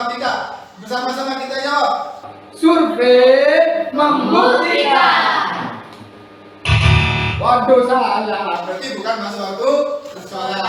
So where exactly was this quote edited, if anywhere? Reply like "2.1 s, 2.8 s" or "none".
none